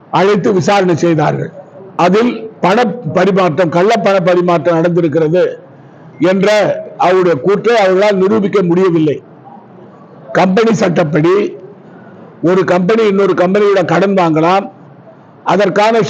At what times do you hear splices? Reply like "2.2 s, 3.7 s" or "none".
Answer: 1.9 s